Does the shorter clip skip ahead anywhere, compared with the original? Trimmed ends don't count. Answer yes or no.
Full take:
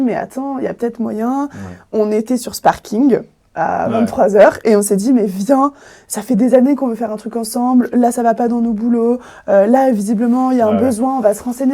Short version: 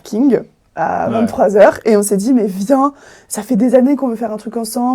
no